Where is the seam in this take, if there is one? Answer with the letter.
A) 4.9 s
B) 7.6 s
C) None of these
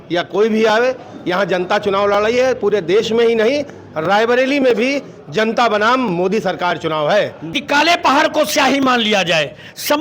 B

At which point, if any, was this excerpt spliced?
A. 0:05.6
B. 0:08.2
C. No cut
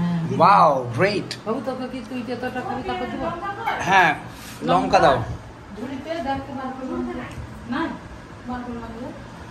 C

